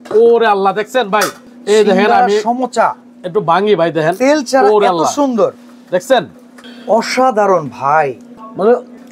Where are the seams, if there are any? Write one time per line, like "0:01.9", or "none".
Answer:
none